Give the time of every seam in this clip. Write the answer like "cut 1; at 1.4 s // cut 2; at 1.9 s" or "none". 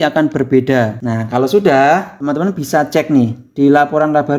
cut 1; at 1.0 s // cut 2; at 2.1 s